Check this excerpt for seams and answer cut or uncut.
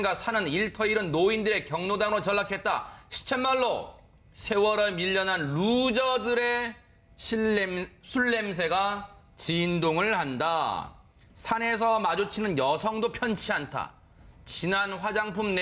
cut